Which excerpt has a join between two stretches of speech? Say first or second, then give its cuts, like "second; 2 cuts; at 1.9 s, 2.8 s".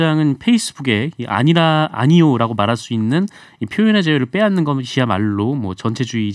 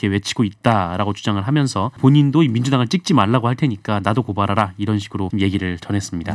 second; 2 cuts; at 2.0 s, 5.3 s